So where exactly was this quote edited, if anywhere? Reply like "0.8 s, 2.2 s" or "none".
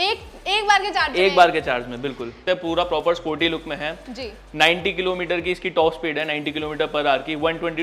2.4 s